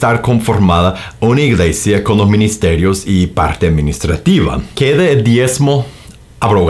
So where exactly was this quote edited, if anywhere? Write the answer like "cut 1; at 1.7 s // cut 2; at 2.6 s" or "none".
cut 1; at 4.7 s